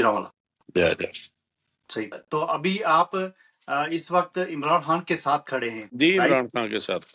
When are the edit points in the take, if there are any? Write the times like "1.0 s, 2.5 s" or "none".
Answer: 2.2 s